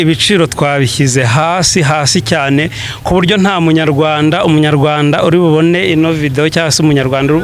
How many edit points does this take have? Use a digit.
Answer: 0